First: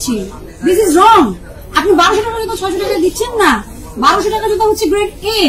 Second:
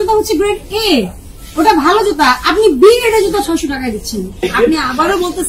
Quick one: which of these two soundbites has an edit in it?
second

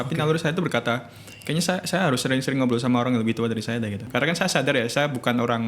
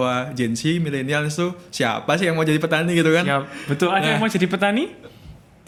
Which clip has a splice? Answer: first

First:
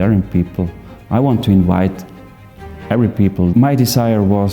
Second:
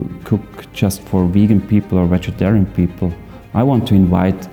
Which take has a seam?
first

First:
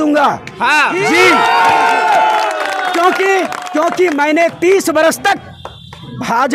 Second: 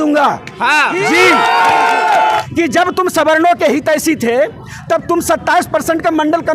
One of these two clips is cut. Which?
second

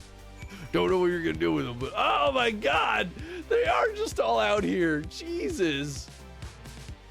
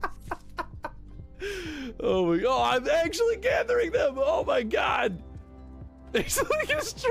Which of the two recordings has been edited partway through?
first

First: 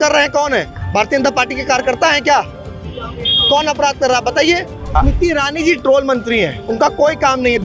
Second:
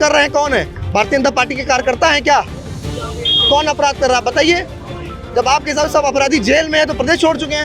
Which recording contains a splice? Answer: first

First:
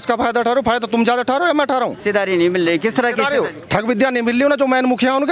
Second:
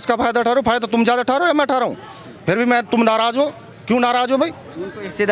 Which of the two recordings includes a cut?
first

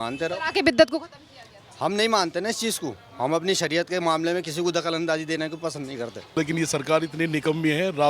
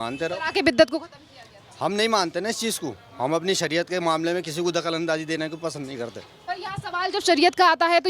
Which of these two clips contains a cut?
first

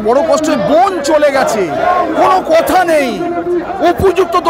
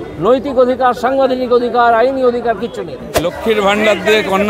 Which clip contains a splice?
second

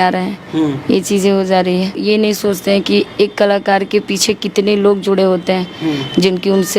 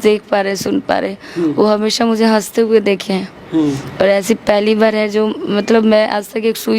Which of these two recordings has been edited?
first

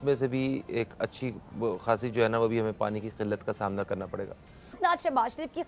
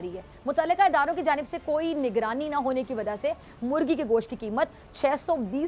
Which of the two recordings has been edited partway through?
first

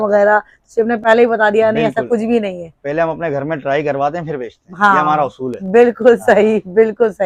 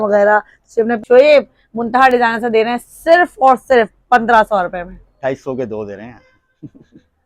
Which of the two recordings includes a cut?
second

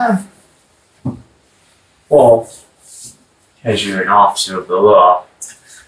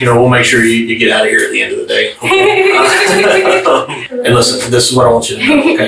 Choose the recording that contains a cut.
second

